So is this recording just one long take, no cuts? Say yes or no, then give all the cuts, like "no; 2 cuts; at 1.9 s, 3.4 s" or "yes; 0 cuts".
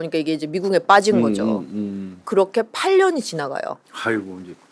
yes; 0 cuts